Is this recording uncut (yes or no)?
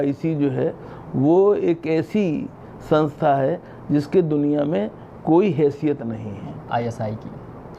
no